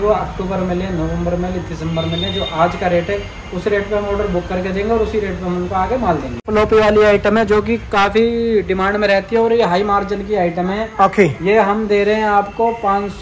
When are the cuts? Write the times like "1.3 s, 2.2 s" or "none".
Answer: 6.5 s